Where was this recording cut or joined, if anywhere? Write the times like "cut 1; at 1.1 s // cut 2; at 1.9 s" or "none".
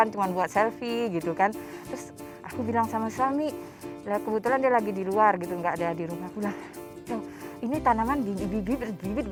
none